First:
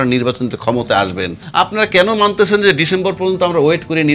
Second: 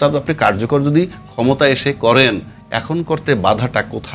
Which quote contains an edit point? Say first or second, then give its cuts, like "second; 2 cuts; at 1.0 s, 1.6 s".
first; 1 cut; at 1.4 s